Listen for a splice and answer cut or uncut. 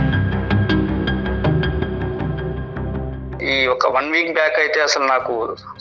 cut